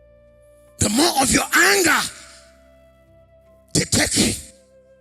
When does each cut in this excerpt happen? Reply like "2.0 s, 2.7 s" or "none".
0.8 s, 2.1 s, 3.7 s